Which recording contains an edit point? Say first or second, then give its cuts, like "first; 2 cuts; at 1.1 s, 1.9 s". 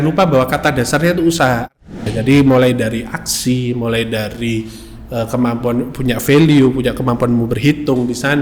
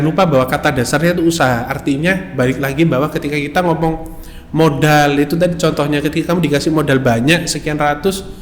first; 1 cut; at 2.0 s